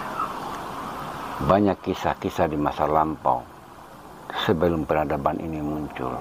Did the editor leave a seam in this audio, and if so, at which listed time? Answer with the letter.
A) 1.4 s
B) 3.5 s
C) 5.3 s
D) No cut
D